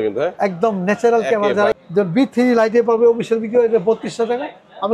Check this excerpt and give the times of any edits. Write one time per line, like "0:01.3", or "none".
0:01.7

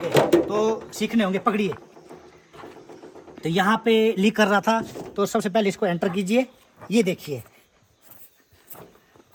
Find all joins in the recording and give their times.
none

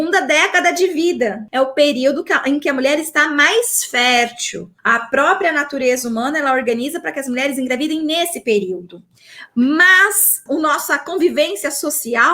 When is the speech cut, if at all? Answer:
0:01.4
0:04.7
0:10.4

